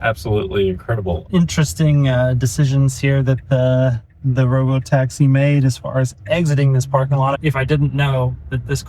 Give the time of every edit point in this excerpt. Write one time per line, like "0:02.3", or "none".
0:01.2
0:07.4